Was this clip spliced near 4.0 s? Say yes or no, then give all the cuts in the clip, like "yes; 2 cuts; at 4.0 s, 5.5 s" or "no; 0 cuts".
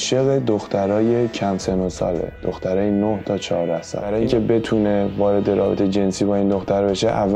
yes; 1 cut; at 4.0 s